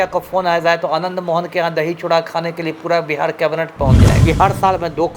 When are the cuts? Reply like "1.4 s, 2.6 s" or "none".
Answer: 4.2 s

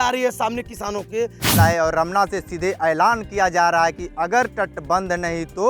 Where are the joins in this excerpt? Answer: 1.6 s

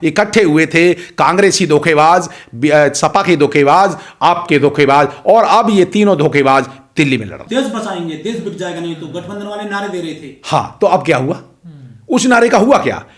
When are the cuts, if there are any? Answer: none

